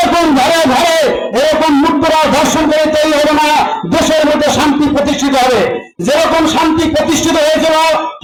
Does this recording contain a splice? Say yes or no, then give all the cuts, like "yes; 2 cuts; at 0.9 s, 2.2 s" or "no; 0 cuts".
no; 0 cuts